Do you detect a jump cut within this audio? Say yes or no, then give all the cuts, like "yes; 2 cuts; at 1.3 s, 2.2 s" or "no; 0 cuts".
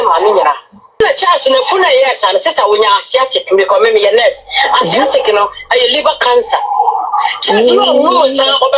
yes; 1 cut; at 1.0 s